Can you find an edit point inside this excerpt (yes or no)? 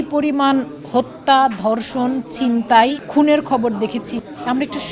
yes